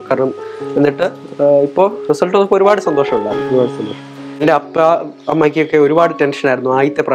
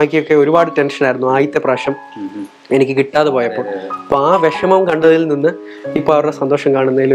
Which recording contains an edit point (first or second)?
first